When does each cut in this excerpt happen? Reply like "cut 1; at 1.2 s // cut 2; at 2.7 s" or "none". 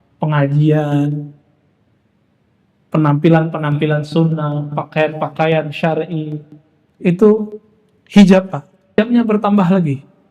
cut 1; at 9.0 s